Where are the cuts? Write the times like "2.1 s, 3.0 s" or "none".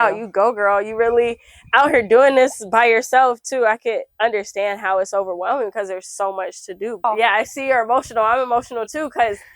7.0 s